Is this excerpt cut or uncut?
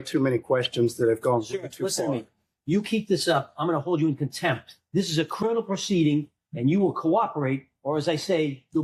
uncut